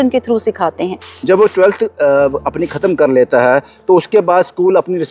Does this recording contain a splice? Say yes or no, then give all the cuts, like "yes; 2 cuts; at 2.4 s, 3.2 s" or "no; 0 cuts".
yes; 1 cut; at 1.1 s